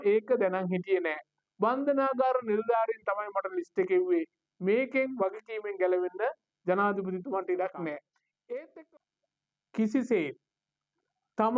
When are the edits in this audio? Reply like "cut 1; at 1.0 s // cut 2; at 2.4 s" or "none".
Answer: cut 1; at 8.7 s